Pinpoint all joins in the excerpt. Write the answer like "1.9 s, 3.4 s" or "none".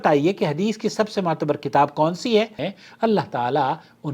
2.7 s